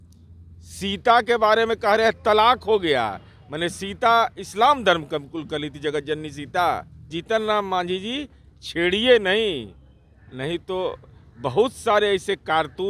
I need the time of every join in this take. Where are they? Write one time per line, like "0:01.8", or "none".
0:07.2

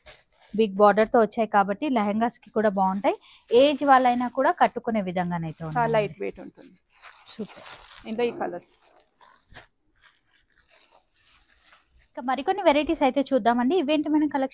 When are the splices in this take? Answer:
none

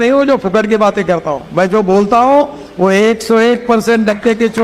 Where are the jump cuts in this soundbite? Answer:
none

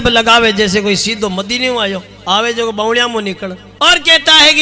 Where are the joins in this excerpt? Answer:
0:03.6

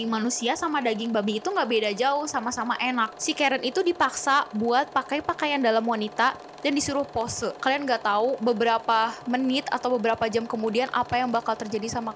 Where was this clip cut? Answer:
0:03.2
0:07.6

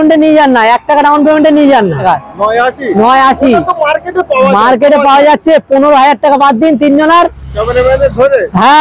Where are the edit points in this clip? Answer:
0:02.0

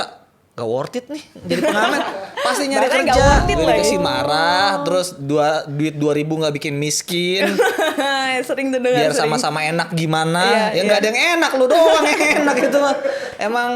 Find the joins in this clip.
0:03.5

